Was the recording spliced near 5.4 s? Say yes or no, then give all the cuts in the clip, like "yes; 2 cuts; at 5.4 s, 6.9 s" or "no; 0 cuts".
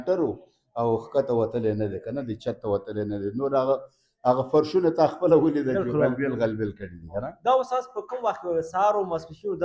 no; 0 cuts